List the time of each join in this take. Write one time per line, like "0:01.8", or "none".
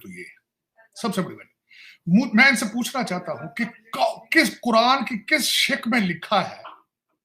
none